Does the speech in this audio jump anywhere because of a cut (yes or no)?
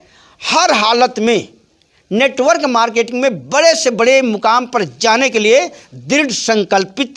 no